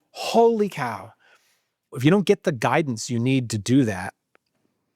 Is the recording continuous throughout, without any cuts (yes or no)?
no